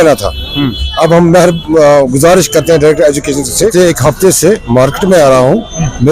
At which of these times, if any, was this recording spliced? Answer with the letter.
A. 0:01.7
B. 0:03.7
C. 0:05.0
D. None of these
B